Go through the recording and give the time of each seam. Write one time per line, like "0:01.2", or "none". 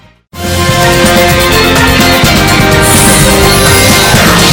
none